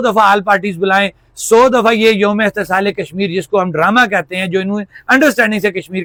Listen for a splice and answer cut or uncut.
uncut